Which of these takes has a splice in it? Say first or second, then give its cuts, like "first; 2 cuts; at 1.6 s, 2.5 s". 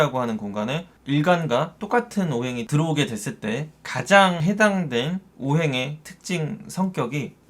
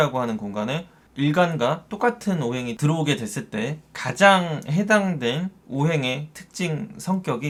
first; 2 cuts; at 0.9 s, 4.4 s